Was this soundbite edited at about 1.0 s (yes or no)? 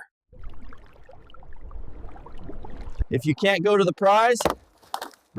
no